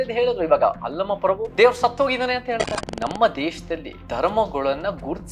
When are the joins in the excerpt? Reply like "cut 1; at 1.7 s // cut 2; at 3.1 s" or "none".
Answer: cut 1; at 1.5 s // cut 2; at 2.8 s // cut 3; at 4.0 s